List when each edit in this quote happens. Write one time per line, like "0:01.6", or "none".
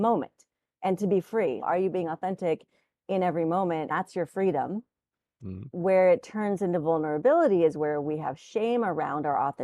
0:01.6
0:03.9
0:05.7